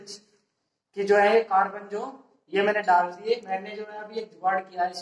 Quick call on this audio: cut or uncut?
uncut